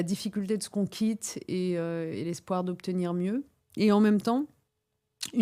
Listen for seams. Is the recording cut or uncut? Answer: uncut